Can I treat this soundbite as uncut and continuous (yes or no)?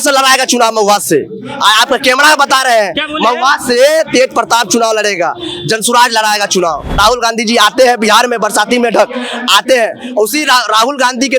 no